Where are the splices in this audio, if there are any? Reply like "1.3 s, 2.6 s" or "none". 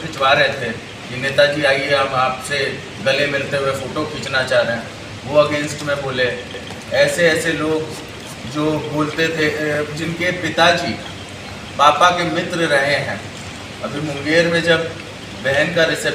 none

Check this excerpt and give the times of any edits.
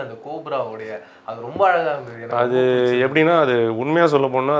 none

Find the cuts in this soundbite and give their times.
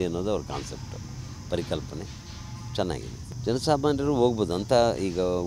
none

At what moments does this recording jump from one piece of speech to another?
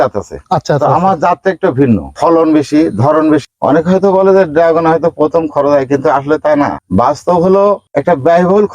2.1 s, 3.4 s, 6.8 s

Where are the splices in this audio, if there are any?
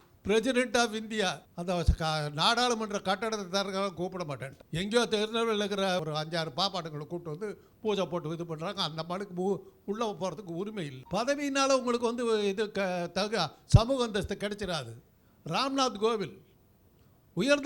1.5 s, 4.5 s, 6.0 s, 11.0 s

